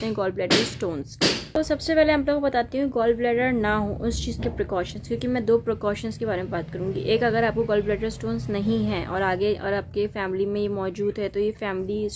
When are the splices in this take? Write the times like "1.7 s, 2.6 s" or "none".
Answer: none